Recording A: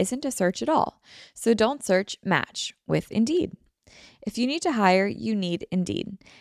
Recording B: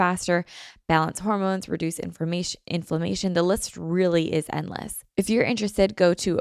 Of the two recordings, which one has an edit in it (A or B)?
B